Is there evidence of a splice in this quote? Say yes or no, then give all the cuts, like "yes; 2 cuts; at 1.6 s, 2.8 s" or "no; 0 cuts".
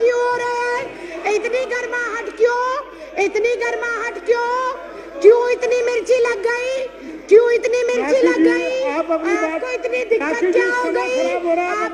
no; 0 cuts